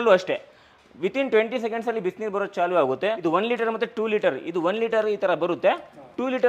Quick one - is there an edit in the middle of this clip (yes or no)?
yes